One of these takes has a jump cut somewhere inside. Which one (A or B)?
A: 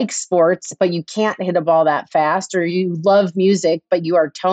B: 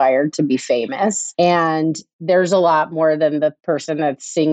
B